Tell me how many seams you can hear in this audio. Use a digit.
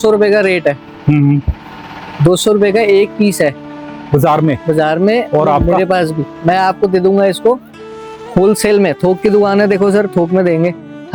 0